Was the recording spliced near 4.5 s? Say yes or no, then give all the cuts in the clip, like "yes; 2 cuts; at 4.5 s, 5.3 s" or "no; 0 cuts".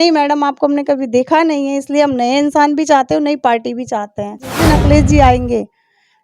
yes; 1 cut; at 4.5 s